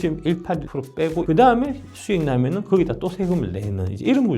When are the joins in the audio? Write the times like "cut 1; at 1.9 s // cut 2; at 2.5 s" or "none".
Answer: cut 1; at 1.2 s